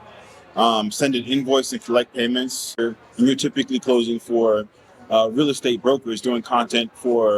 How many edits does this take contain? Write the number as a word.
one